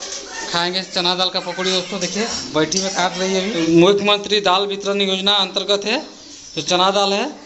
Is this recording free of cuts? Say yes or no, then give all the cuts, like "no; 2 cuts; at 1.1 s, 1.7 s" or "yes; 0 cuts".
no; 1 cut; at 3.5 s